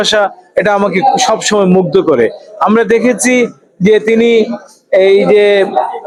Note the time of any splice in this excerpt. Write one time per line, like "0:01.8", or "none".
none